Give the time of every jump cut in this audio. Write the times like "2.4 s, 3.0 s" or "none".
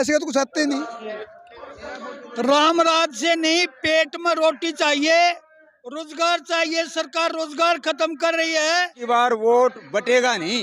1.2 s, 9.0 s